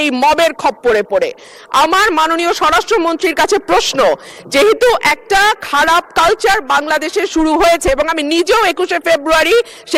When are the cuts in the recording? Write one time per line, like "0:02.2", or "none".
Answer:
none